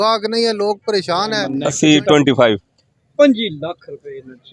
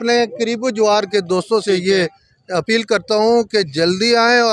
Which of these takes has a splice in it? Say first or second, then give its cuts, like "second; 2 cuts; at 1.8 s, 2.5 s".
first; 1 cut; at 1.6 s